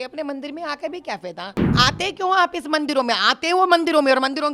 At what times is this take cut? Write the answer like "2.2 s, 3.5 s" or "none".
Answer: 1.7 s